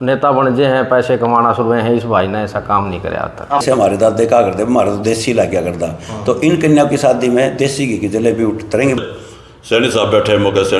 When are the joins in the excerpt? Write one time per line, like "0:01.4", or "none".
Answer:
0:03.6
0:09.0